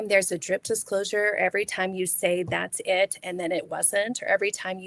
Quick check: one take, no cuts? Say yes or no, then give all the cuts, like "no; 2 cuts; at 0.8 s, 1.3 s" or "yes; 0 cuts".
yes; 0 cuts